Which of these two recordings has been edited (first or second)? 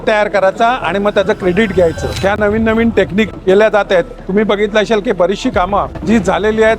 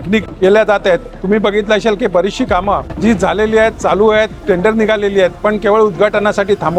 first